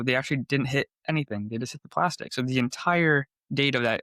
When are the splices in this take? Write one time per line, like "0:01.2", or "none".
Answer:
none